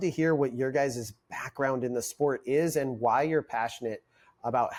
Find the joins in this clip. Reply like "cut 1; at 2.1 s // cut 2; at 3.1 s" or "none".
none